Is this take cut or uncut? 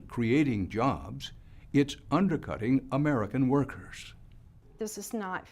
cut